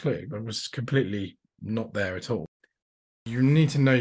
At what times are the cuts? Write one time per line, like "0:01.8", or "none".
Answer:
0:02.9